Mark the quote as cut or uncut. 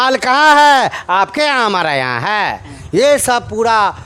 uncut